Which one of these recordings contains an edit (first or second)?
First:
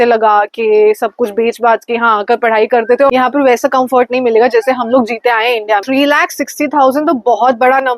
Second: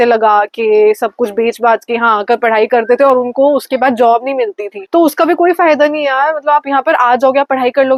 first